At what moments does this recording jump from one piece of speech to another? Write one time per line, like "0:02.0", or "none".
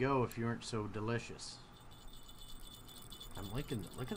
0:01.9